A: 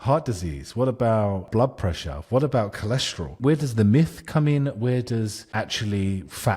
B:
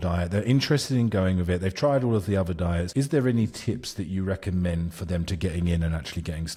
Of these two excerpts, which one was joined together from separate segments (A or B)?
A